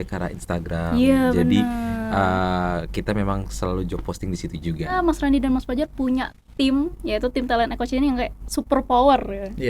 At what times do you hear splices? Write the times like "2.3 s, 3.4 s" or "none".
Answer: 4.9 s